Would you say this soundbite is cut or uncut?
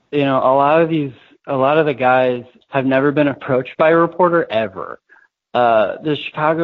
cut